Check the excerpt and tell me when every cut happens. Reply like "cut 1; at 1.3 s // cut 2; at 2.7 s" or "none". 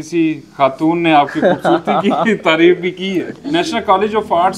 cut 1; at 3.4 s